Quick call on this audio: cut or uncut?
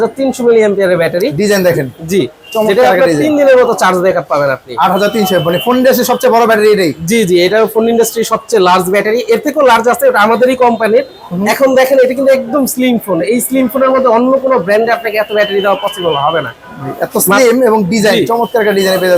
uncut